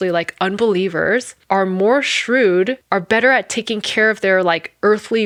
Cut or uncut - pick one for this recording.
uncut